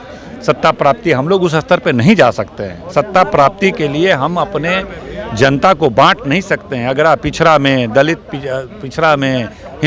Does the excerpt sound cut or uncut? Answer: uncut